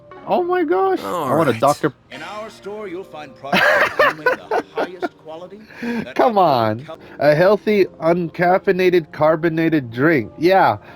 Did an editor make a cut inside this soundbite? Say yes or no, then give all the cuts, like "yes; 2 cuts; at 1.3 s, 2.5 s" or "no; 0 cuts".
yes; 1 cut; at 7.0 s